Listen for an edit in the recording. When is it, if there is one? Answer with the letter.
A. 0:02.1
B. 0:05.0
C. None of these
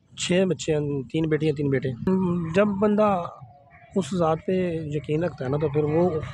A